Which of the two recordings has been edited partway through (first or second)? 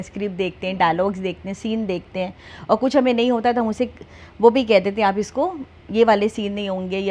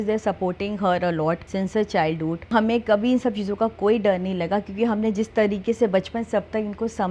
second